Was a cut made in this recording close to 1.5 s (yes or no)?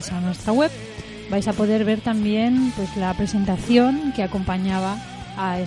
yes